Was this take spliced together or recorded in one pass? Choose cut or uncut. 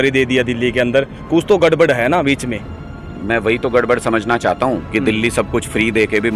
uncut